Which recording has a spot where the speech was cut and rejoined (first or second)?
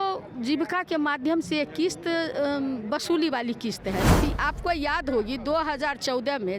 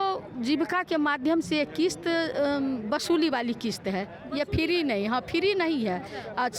first